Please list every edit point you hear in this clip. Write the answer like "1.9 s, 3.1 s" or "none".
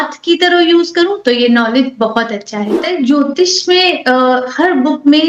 2.9 s